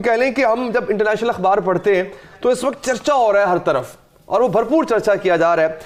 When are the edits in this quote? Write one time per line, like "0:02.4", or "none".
none